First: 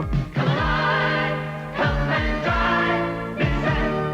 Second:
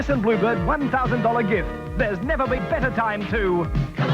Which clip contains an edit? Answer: second; 1 cut; at 2.6 s

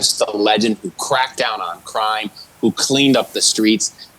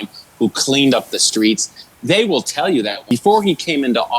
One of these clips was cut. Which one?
second; 1 cut; at 3.0 s

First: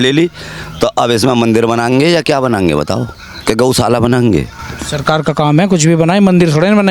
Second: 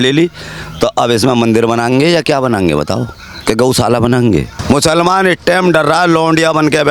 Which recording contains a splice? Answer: second; 1 cut; at 4.5 s

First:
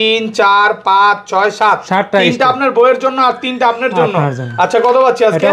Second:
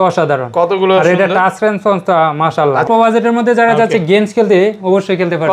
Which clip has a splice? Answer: second; 1 cut; at 2.9 s

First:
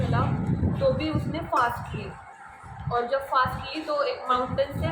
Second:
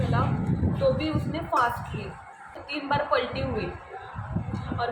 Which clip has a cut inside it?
second; 1 cut; at 2.6 s

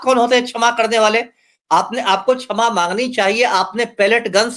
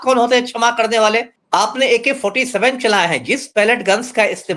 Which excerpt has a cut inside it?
second; 1 cut; at 1.4 s

